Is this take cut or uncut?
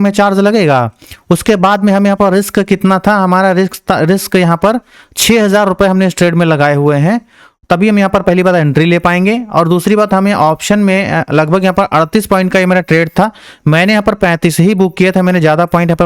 uncut